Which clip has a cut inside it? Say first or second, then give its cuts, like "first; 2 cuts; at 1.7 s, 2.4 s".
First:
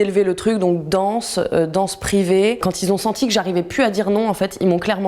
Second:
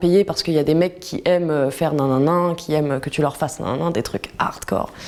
first; 1 cut; at 2.7 s